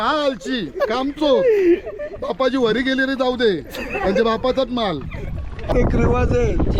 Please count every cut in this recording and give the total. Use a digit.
1